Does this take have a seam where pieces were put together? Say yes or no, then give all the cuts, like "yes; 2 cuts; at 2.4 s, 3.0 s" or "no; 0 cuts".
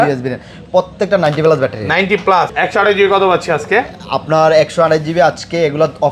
yes; 1 cut; at 2.5 s